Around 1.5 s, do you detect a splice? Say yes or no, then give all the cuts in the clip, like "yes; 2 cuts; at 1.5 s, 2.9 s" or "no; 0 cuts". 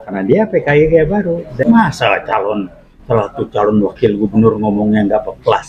yes; 1 cut; at 1.5 s